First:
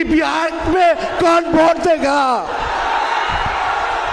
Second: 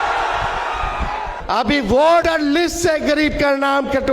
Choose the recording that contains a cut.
second; 2 cuts; at 1.3 s, 2.2 s

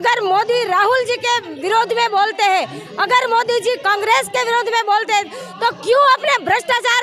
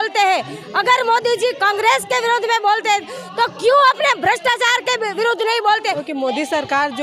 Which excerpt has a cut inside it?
second; 1 cut; at 6.0 s

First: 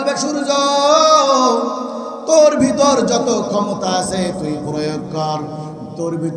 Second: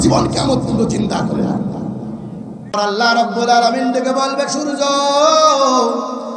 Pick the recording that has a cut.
second; 1 cut; at 2.8 s

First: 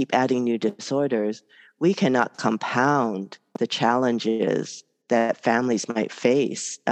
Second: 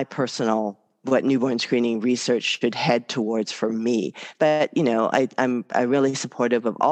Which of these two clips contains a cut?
second; 1 cut; at 0.9 s

